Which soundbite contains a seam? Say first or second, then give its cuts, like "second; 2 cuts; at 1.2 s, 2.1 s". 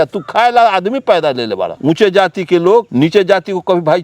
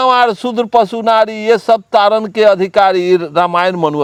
first; 2 cuts; at 1.7 s, 2.9 s